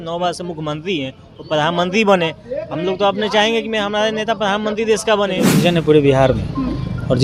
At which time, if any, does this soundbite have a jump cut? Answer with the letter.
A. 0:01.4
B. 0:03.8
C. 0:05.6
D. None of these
C